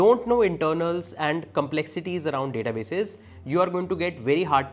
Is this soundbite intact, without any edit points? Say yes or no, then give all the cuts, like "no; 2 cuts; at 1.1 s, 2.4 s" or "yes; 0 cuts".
yes; 0 cuts